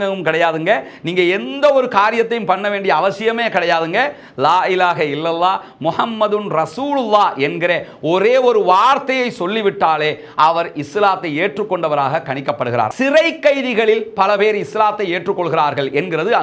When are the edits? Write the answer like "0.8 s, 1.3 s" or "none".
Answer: 12.9 s